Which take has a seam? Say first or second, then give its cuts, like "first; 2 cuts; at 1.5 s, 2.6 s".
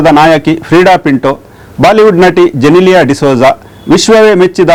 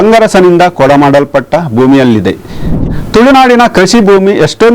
second; 1 cut; at 2.6 s